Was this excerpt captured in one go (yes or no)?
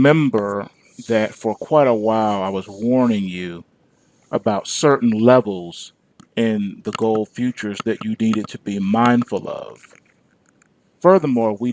no